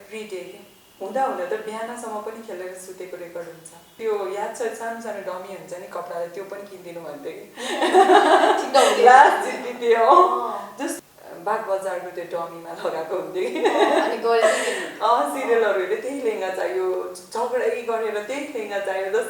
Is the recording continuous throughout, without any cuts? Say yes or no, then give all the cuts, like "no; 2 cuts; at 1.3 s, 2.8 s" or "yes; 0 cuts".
no; 2 cuts; at 4.0 s, 10.9 s